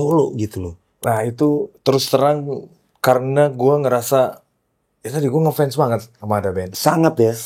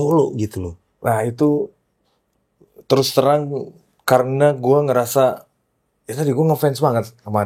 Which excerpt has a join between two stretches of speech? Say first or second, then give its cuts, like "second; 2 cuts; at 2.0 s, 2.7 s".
first; 1 cut; at 1.7 s